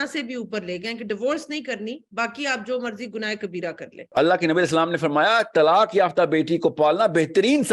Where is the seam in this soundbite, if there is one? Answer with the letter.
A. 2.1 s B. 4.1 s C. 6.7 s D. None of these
B